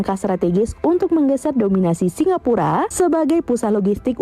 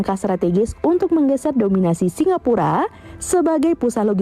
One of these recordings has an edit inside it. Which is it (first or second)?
first